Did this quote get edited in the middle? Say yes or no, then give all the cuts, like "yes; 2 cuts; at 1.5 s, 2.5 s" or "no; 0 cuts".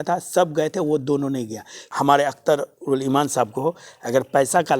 yes; 1 cut; at 1.8 s